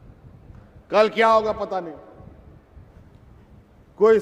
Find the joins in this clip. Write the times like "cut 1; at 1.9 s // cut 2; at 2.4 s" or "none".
cut 1; at 2.9 s